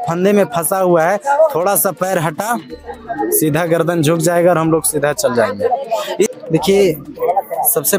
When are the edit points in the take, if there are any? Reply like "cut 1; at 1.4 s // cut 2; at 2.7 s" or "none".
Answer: cut 1; at 6.3 s